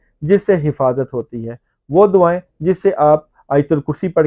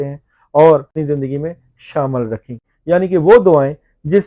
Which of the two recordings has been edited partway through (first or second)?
second